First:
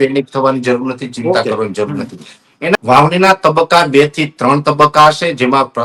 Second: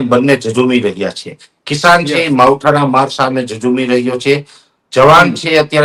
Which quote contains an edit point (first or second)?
first